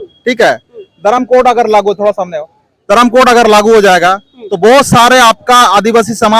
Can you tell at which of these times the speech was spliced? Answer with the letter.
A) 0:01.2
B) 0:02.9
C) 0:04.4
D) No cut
D